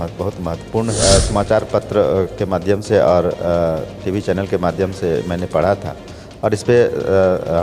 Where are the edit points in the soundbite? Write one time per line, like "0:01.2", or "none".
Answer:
0:01.0